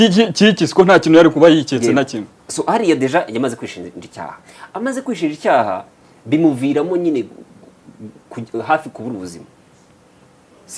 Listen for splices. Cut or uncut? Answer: uncut